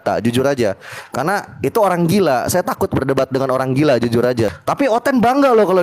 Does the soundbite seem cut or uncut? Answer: cut